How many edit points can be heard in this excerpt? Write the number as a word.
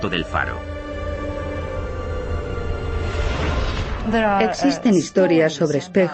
one